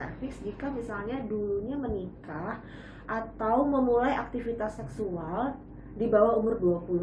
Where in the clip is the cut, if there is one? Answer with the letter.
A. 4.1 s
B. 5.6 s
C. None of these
B